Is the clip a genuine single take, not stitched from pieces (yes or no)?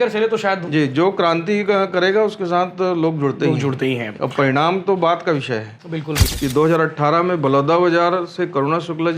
no